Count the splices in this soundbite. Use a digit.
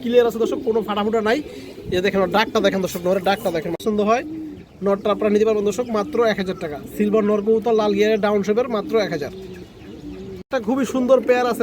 2